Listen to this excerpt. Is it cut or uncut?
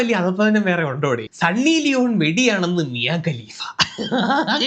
cut